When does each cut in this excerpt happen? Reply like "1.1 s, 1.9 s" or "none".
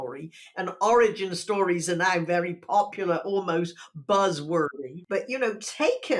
4.7 s